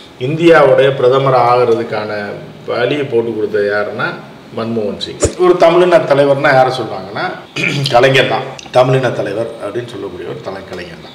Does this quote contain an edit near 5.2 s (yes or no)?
yes